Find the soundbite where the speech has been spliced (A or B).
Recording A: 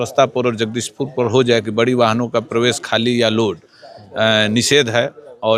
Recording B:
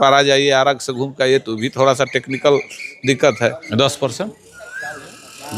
B